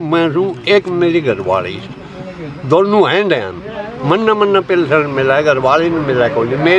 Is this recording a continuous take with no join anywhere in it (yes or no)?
yes